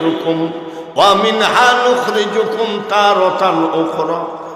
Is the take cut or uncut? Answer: uncut